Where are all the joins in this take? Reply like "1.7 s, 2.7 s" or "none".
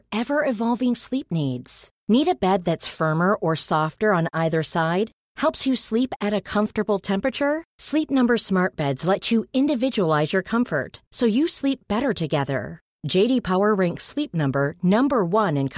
none